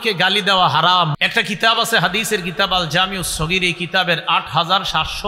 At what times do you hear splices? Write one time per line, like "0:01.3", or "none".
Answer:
0:01.1